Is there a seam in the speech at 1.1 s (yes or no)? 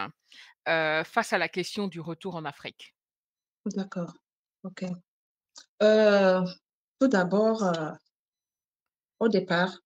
no